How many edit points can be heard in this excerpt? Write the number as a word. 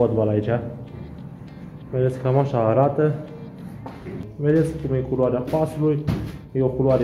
one